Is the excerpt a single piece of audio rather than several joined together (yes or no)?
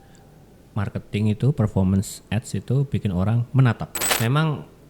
no